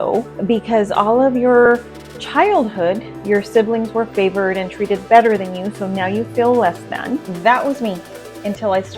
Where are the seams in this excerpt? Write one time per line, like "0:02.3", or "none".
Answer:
0:07.2